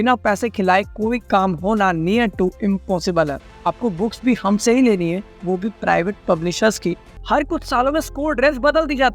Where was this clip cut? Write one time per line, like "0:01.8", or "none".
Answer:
0:03.5
0:07.1